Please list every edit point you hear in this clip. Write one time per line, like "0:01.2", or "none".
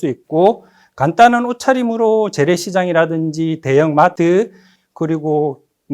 0:04.1